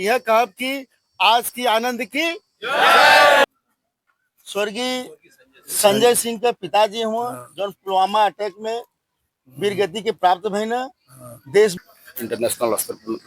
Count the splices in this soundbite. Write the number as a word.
two